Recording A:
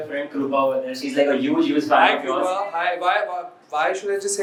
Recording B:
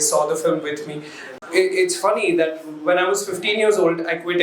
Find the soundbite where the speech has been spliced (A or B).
B